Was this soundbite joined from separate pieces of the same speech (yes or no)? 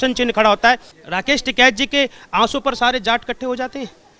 yes